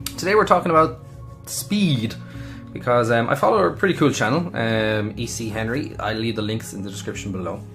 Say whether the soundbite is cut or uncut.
cut